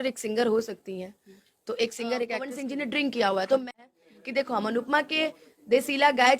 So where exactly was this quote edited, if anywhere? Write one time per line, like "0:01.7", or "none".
0:02.5
0:03.7